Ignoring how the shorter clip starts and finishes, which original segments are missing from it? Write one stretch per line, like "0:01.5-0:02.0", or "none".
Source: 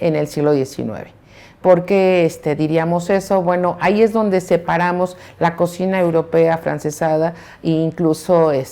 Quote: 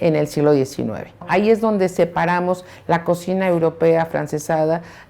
0:01.2-0:03.8